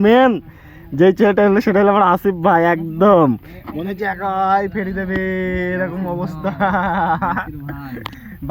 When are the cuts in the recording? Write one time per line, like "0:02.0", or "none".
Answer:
none